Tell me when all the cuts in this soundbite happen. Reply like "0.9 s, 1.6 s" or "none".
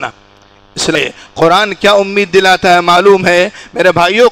0.9 s

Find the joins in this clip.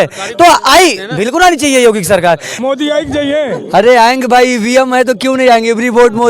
2.5 s

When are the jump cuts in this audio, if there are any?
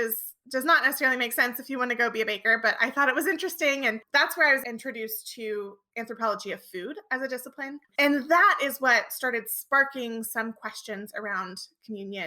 4.6 s, 7.9 s

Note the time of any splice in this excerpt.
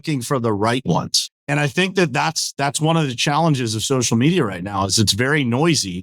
1.2 s

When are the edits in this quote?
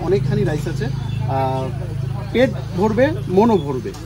none

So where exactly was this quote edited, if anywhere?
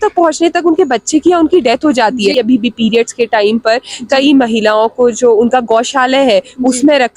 2.3 s

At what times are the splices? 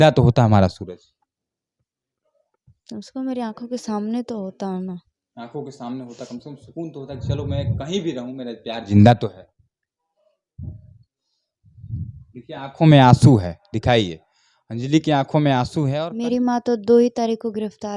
15.9 s

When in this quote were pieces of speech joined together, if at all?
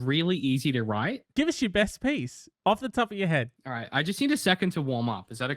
1.3 s, 3.5 s

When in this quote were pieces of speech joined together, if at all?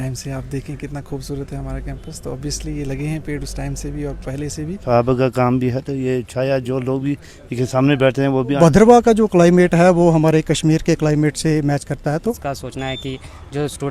4.8 s, 8.6 s, 12.1 s

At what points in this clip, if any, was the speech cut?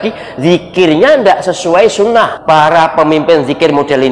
2.4 s

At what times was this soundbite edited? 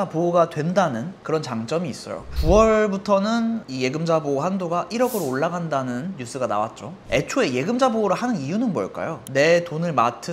1.2 s, 7.0 s, 9.1 s

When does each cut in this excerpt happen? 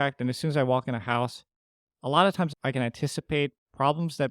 2.5 s

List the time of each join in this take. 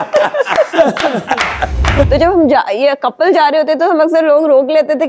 2.1 s

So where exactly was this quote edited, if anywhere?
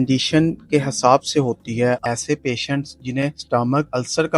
2.0 s

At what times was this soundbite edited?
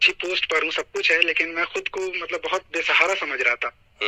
none

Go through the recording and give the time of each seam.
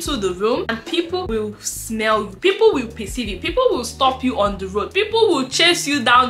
0.9 s

